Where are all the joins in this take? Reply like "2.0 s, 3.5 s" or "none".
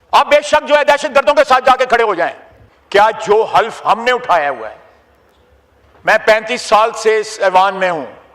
2.6 s